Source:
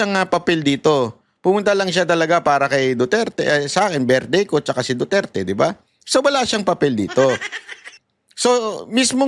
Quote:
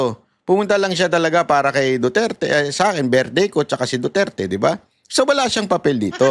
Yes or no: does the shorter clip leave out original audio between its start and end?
no